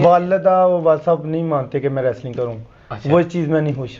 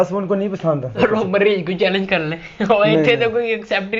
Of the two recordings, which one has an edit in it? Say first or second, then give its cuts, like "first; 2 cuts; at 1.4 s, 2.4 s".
second; 1 cut; at 1.0 s